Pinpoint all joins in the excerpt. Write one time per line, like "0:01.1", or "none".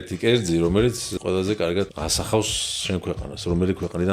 0:01.1
0:01.9